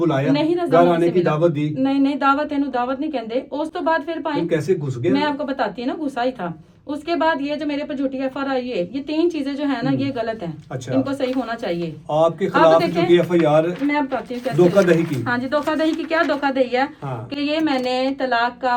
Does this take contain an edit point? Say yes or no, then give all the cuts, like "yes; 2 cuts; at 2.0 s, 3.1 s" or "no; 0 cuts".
no; 0 cuts